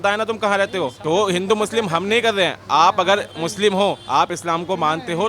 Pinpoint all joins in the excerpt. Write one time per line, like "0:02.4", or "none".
0:01.0
0:04.0